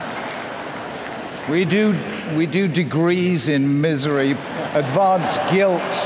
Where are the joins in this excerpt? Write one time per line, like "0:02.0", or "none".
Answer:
0:04.4